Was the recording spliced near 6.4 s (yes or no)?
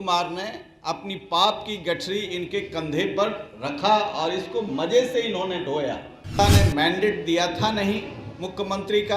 yes